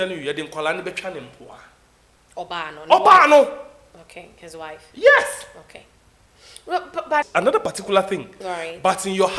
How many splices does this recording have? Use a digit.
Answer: 1